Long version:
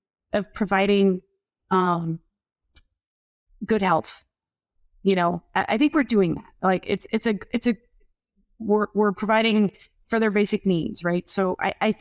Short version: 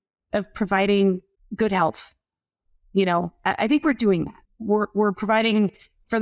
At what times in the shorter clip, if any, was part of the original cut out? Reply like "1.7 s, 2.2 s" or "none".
1.4 s, 4.4 s

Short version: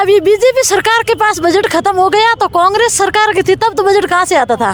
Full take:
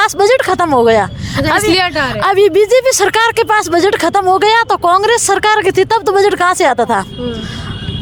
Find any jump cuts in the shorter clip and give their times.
none

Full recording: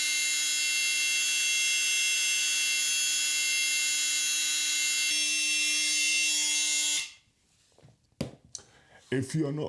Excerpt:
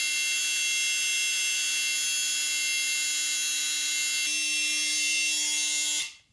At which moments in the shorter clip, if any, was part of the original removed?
4.3 s

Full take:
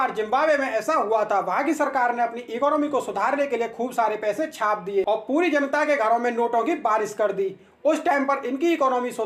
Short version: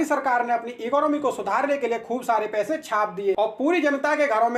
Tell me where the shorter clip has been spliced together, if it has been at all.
none

